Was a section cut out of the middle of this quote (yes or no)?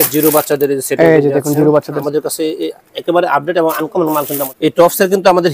yes